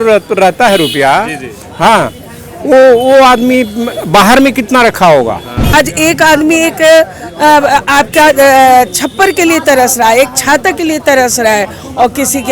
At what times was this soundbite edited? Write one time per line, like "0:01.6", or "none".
0:05.5